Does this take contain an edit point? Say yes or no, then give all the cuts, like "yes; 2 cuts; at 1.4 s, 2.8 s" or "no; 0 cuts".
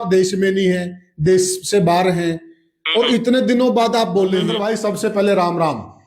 yes; 1 cut; at 4.5 s